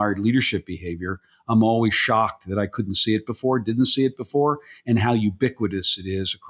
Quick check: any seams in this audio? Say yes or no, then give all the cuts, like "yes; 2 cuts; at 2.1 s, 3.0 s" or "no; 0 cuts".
no; 0 cuts